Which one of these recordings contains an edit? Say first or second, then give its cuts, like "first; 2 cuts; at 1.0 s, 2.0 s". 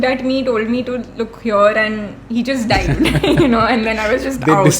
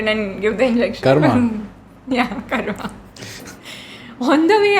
second; 1 cut; at 3.4 s